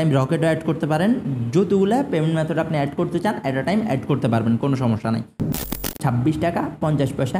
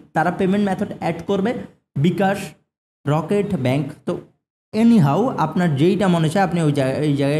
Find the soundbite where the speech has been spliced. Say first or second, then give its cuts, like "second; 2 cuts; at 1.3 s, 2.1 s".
first; 1 cut; at 5.8 s